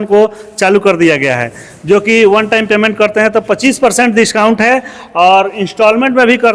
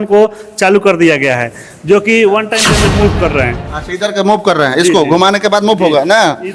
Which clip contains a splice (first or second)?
second